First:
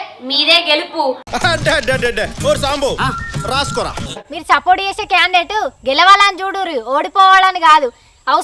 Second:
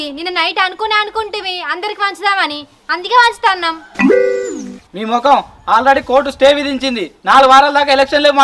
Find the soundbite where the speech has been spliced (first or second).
first